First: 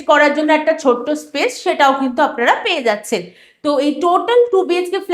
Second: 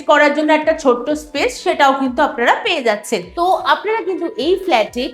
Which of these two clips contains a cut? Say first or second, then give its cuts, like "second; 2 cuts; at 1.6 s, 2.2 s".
second; 1 cut; at 3.3 s